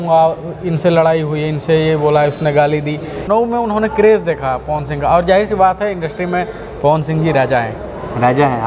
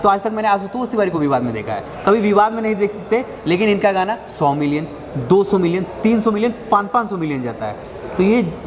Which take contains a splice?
first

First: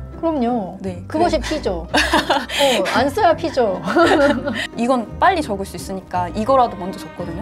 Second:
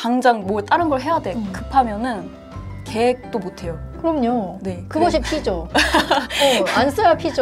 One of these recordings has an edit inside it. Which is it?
first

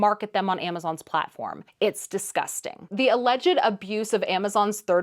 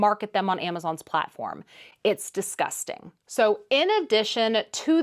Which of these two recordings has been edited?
first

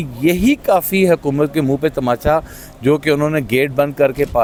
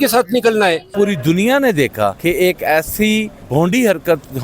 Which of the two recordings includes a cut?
second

